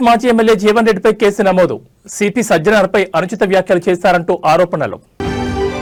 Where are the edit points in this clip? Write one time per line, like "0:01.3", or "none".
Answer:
none

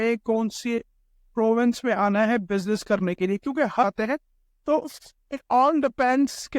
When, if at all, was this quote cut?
0:03.8

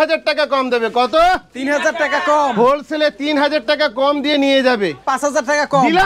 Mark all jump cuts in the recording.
0:05.0

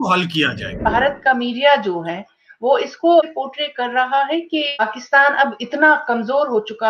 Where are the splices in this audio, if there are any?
0:00.8
0:03.3
0:04.8

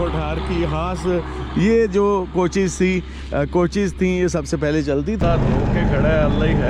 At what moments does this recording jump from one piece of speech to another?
0:05.2

